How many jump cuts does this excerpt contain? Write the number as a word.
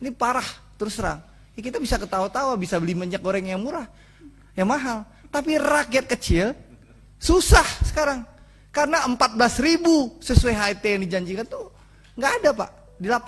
zero